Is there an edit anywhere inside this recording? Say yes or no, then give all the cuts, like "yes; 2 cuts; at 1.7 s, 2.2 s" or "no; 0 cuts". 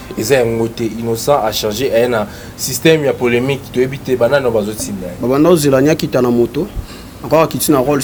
no; 0 cuts